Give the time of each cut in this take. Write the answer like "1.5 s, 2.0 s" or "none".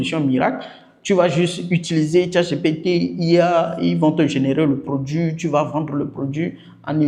none